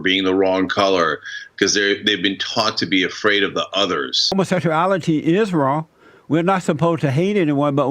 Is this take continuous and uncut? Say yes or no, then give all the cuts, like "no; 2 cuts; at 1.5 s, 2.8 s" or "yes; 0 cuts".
no; 1 cut; at 4.3 s